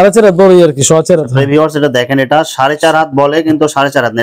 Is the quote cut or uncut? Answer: uncut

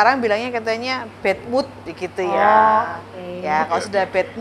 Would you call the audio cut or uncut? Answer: uncut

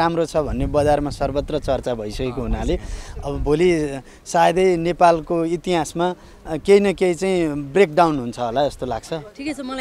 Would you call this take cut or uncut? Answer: uncut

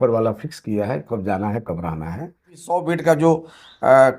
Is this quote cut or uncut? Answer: cut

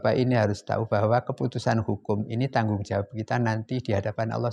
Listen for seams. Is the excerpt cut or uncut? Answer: uncut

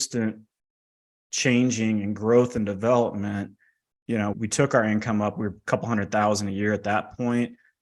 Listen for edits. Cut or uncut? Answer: cut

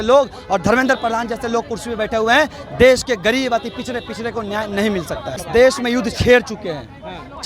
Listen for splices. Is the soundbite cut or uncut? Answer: cut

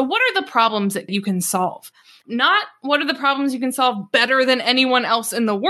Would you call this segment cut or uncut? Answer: cut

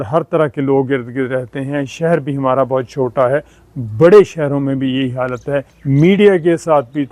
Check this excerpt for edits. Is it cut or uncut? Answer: cut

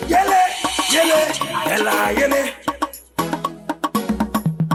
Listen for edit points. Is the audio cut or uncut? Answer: uncut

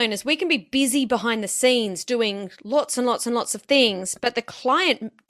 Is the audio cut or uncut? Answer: uncut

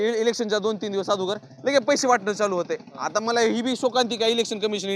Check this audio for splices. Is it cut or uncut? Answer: uncut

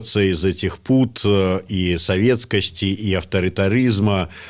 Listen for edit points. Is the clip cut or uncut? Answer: uncut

